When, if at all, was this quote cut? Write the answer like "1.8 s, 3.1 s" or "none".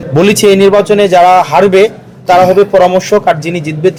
none